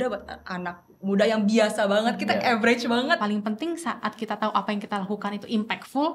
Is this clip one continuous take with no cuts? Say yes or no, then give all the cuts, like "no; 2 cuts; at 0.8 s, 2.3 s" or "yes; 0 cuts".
no; 1 cut; at 3.2 s